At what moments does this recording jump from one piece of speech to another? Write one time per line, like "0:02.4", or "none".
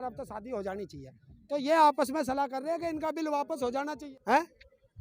0:04.1